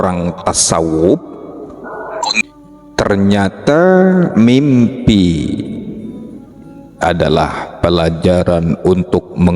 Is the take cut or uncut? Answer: cut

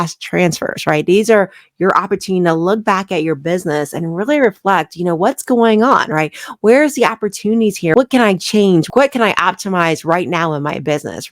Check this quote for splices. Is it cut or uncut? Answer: cut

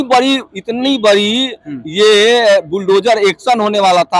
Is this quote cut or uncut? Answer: uncut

